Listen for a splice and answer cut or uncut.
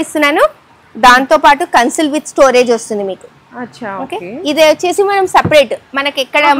uncut